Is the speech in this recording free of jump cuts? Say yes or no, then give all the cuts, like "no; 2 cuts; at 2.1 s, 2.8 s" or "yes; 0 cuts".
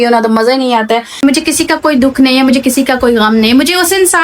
no; 1 cut; at 1.2 s